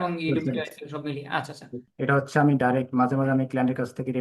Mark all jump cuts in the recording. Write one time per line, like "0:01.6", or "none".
0:01.8